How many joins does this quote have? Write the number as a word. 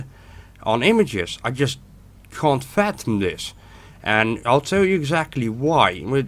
one